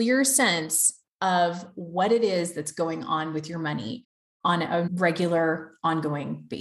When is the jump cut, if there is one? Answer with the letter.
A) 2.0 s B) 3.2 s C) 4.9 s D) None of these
C